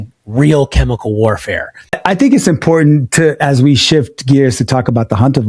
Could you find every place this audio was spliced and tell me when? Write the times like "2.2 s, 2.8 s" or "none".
2.0 s

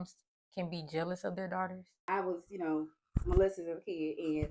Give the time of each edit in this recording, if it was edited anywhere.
2.0 s

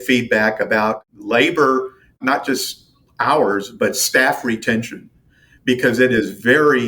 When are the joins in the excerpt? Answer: 1.0 s, 2.2 s

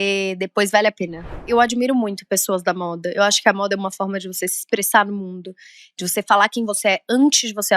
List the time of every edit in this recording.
1.5 s

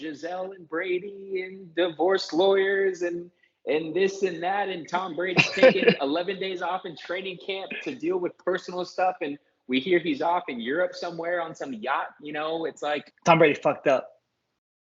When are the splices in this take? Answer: 13.1 s

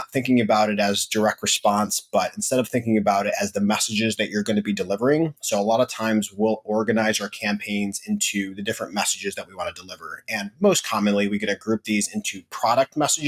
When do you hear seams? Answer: none

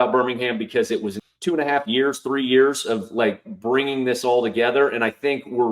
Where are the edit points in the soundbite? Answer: 1.2 s

